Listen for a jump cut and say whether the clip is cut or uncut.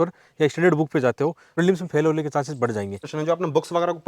cut